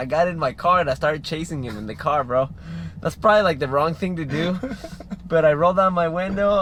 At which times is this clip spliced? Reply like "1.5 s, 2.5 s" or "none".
none